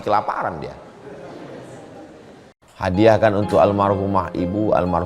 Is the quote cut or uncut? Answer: cut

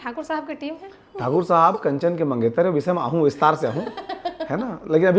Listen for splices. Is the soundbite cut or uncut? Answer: uncut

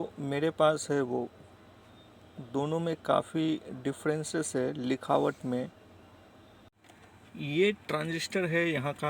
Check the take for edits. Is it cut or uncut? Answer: cut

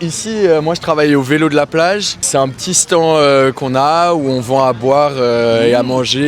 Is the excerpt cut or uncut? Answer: cut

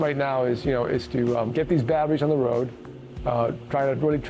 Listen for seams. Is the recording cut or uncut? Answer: uncut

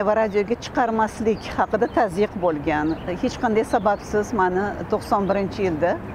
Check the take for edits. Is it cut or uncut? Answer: uncut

